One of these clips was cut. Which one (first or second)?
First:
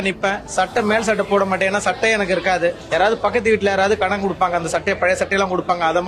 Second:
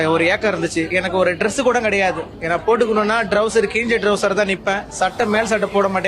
second